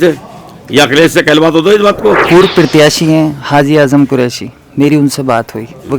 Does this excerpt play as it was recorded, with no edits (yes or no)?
no